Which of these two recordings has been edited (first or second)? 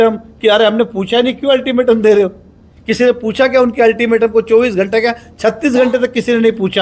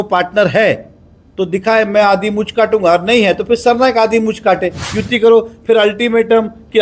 second